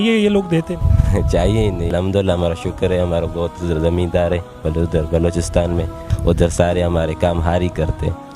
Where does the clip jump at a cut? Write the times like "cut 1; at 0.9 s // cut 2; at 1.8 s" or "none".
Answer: cut 1; at 1.9 s // cut 2; at 6.0 s